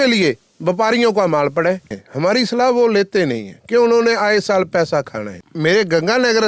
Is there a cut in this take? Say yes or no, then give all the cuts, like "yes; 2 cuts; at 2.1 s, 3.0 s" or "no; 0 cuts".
yes; 2 cuts; at 2.0 s, 5.5 s